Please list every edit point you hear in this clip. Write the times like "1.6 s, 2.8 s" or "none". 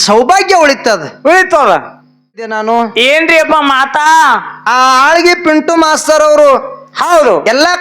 2.6 s